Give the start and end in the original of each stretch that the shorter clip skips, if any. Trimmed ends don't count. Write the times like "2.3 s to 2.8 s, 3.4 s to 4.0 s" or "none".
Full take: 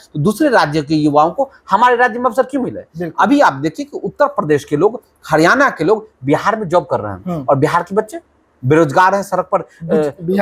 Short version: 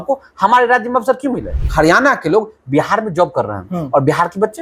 2.9 s to 5.1 s